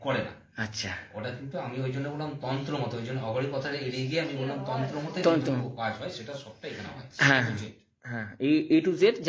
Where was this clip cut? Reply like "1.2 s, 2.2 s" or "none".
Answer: none